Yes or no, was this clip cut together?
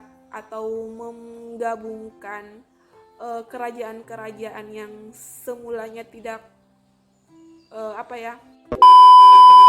yes